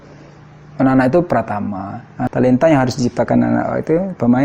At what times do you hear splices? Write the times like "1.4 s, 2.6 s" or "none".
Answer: 2.2 s